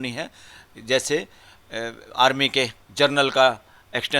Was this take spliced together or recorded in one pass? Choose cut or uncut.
cut